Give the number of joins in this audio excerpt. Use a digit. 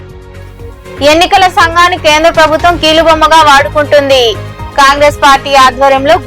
1